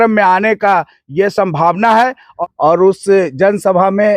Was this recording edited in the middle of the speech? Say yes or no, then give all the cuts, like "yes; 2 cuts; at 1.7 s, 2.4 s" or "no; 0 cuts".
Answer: yes; 1 cut; at 2.3 s